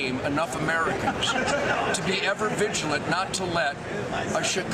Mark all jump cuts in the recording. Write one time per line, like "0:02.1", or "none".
0:02.1

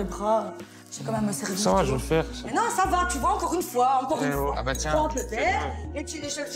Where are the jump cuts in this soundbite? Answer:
0:04.5

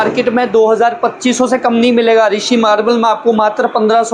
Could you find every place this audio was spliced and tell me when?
none

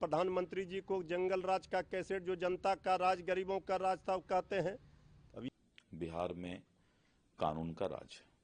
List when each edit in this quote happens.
0:05.4

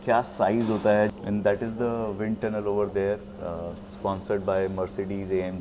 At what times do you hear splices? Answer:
0:01.1

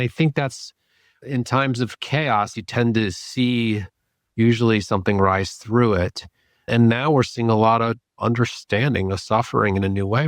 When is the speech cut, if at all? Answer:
0:02.5

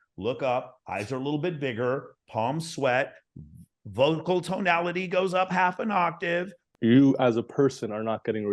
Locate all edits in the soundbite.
0:06.7

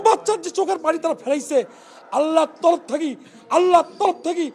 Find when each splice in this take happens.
none

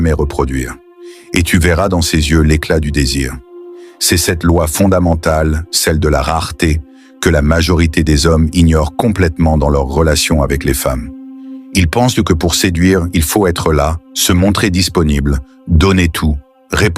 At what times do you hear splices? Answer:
0:12.7

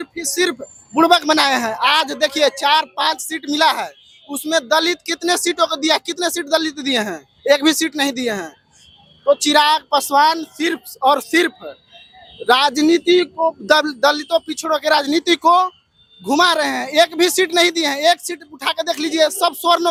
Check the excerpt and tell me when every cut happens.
none

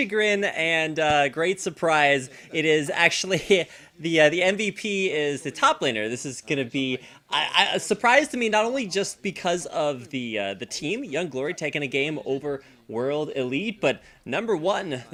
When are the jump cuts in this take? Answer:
none

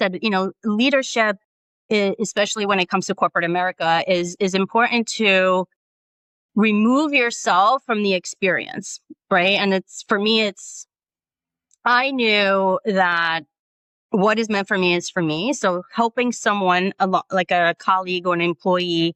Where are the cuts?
none

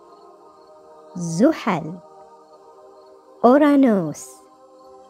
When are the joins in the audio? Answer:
none

